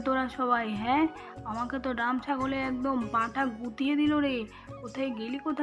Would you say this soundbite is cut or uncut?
uncut